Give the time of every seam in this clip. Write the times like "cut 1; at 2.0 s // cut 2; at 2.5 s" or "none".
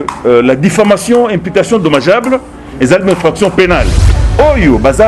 cut 1; at 4.1 s